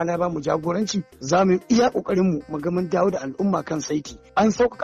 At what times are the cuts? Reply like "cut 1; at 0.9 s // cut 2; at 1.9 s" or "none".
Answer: cut 1; at 1.1 s